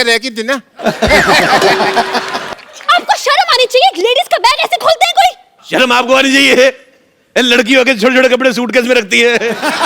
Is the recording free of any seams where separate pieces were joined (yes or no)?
no